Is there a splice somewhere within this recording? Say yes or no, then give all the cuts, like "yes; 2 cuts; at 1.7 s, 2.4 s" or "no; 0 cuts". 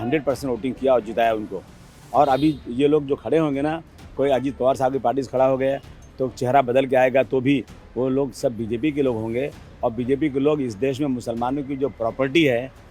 no; 0 cuts